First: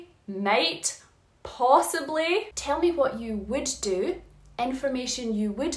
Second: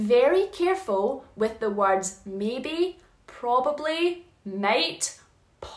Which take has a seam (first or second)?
first